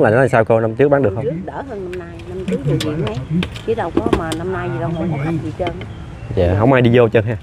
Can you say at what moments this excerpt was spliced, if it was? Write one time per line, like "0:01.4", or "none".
none